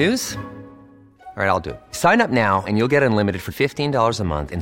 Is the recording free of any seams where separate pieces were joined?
yes; 0 cuts

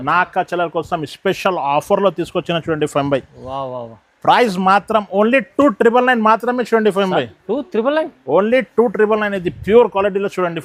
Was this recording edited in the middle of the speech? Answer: no; 0 cuts

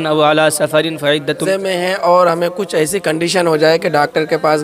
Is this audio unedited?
no; 1 cut; at 1.4 s

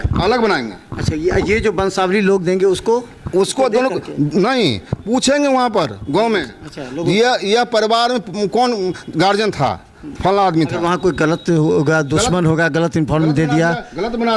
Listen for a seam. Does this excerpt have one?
no; 0 cuts

